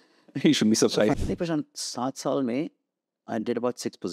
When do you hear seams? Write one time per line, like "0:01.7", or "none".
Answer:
0:01.1